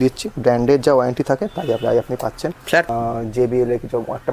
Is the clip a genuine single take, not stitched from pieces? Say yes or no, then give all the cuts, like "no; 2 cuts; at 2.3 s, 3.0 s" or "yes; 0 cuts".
no; 1 cut; at 2.9 s